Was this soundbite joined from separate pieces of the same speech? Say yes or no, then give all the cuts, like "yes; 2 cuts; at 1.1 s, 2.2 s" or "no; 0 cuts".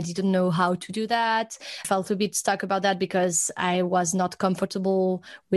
yes; 1 cut; at 1.8 s